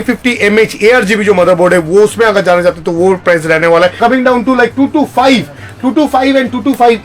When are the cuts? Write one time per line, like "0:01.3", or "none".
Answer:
0:04.0